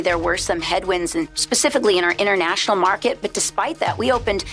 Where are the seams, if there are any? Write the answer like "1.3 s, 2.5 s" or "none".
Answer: 1.4 s